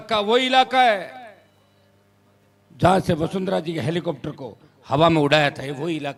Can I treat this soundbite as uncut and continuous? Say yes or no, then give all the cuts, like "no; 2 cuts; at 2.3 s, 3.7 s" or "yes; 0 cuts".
yes; 0 cuts